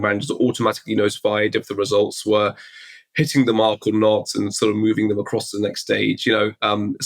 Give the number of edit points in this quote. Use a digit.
0